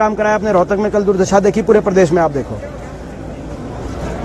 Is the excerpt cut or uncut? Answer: uncut